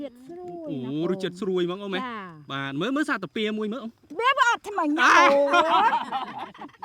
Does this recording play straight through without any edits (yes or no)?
yes